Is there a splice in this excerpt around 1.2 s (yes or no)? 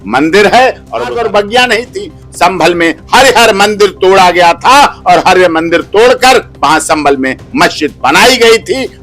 yes